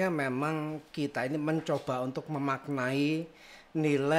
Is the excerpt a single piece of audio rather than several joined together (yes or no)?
yes